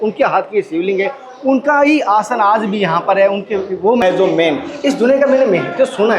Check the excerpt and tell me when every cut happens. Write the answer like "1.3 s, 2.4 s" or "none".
4.0 s

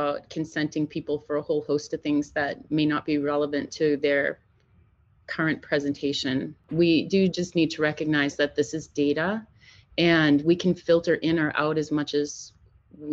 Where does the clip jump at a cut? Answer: 6.6 s

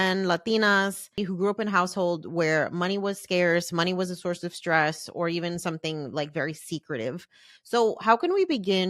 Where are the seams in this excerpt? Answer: 1.2 s

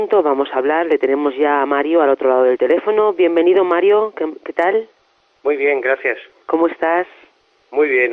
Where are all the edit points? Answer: 2.7 s

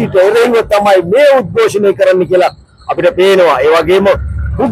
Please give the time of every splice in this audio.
none

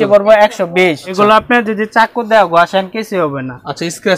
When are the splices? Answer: 1.1 s

